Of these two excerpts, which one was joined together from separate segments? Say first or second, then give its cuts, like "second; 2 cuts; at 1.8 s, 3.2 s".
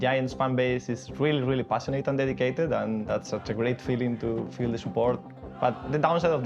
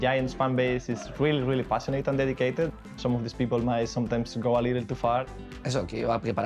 second; 2 cuts; at 2.7 s, 5.2 s